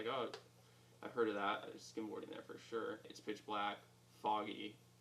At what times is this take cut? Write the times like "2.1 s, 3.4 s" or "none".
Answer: 1.8 s, 3.1 s